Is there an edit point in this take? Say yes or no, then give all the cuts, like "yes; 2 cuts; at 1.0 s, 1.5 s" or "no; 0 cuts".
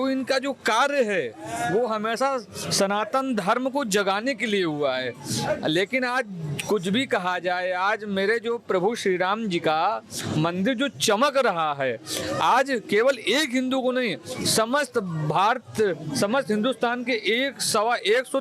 no; 0 cuts